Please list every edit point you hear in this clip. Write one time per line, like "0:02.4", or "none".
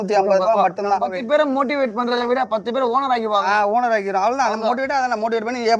0:01.1